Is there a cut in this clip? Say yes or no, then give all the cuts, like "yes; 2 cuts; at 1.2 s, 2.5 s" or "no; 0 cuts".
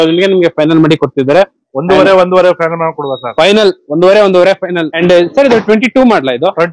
yes; 1 cut; at 4.9 s